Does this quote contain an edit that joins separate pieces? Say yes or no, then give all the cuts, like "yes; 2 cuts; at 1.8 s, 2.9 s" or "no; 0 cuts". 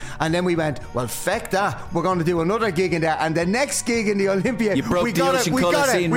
no; 0 cuts